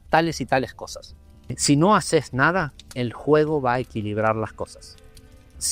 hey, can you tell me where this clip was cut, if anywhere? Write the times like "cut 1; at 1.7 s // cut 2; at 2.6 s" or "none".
cut 1; at 1.6 s